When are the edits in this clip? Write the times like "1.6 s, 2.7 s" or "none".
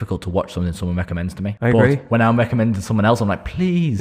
1.5 s